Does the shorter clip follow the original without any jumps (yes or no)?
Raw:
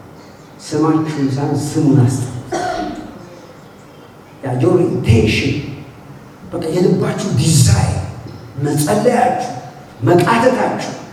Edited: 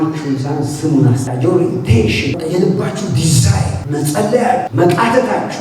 no